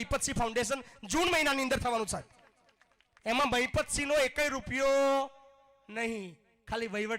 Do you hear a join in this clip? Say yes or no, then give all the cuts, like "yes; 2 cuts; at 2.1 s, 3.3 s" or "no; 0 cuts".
no; 0 cuts